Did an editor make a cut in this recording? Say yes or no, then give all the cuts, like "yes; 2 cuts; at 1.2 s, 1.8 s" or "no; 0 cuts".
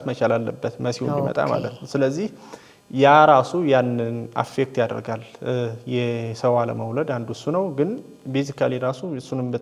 no; 0 cuts